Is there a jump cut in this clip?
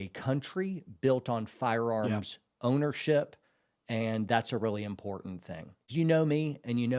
yes; 1 cut; at 5.8 s

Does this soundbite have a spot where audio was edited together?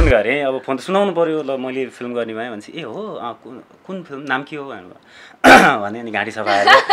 no; 0 cuts

